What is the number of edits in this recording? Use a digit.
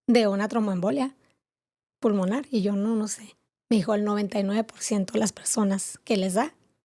0